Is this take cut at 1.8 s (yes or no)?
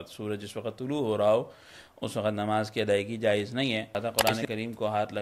no